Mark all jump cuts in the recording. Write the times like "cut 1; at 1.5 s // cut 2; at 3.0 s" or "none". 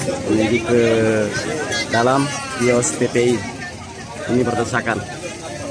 none